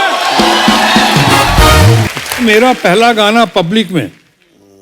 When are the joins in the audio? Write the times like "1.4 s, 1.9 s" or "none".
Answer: 2.2 s